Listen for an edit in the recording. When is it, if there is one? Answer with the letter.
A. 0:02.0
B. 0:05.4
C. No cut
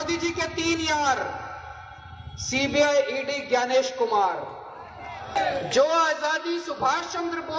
B